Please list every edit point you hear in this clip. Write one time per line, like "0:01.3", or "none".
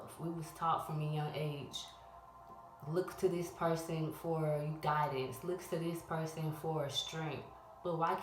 none